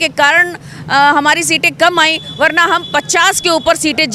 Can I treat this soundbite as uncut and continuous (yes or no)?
yes